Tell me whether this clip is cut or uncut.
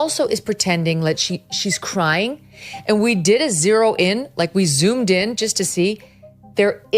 uncut